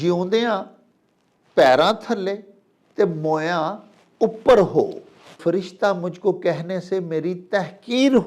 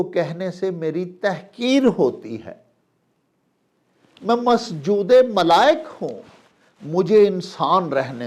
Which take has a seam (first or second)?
first